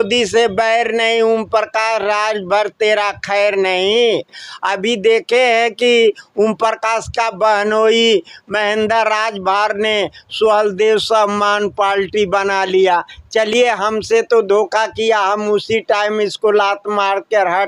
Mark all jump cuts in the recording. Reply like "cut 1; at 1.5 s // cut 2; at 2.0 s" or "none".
none